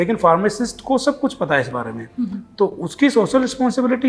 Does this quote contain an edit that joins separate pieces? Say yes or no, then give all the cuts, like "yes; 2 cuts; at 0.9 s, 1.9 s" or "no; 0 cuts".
no; 0 cuts